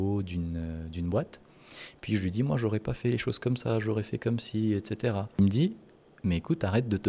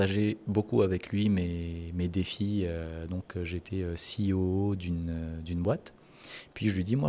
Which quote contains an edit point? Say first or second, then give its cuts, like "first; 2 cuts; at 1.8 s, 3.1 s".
first; 1 cut; at 5.4 s